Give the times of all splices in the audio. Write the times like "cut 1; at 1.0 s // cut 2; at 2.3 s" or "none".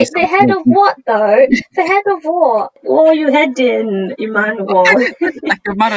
cut 1; at 2.7 s